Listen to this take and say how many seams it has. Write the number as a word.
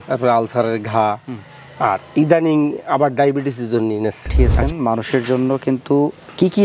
one